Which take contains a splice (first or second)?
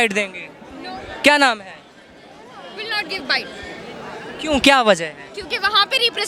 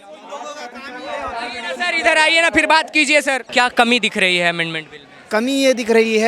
second